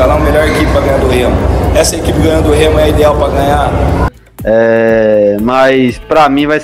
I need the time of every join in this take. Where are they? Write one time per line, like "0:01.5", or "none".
0:04.0